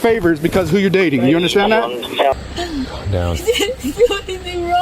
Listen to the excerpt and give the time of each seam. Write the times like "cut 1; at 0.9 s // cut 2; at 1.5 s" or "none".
cut 1; at 2.3 s